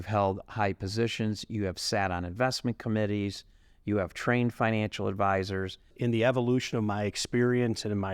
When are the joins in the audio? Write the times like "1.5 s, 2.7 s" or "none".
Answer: 5.9 s

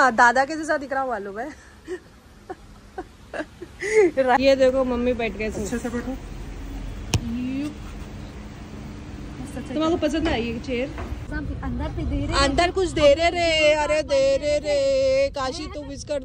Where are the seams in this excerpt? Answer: 4.4 s, 11.2 s

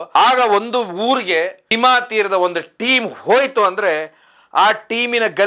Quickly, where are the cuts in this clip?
1.6 s

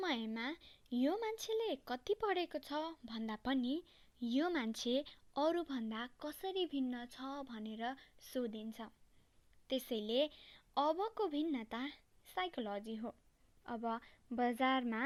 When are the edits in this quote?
none

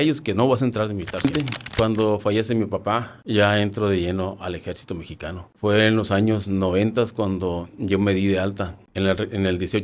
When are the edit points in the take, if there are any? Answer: 1.2 s

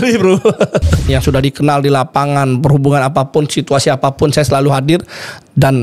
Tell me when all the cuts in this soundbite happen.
1.1 s

